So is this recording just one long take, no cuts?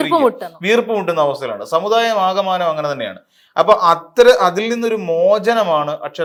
yes; 0 cuts

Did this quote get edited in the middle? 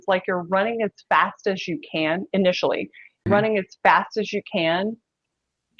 yes; 1 cut; at 3.2 s

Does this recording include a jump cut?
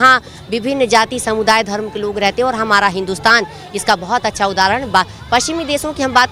no; 0 cuts

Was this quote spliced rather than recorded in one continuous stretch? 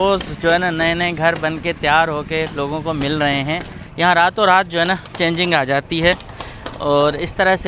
no; 0 cuts

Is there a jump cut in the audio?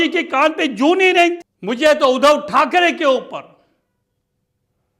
yes; 1 cut; at 1.5 s

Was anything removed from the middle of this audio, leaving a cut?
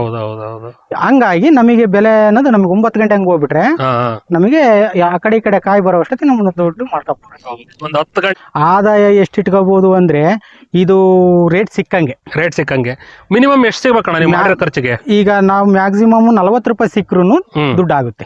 yes; 1 cut; at 8.4 s

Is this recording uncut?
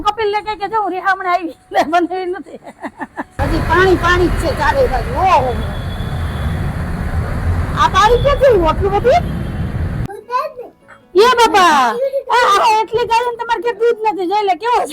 no; 2 cuts; at 3.4 s, 10.0 s

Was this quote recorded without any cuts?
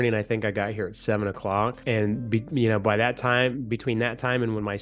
no; 1 cut; at 1.8 s

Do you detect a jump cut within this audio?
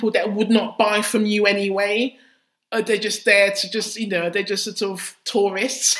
no; 0 cuts

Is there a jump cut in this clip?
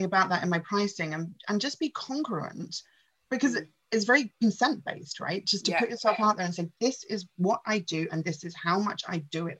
no; 0 cuts

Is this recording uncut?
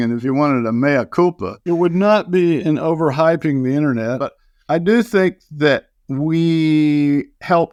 yes; 0 cuts

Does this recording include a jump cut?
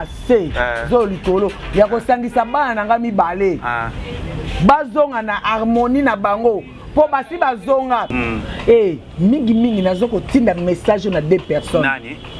yes; 1 cut; at 8.2 s

